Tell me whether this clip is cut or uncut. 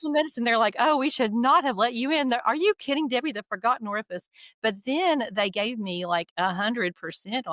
uncut